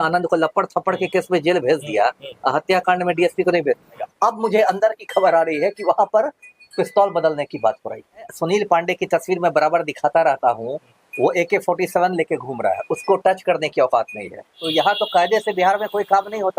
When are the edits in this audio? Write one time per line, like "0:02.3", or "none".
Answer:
0:04.1
0:08.3
0:14.6